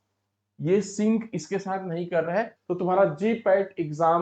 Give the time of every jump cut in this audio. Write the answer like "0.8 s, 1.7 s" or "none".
2.6 s